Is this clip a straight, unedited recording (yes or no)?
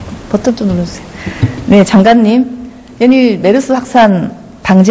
yes